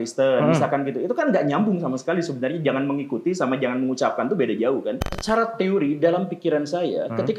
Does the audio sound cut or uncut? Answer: cut